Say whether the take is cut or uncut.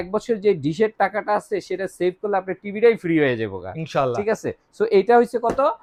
uncut